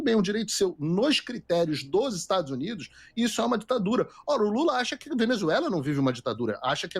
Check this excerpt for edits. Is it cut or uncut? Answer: uncut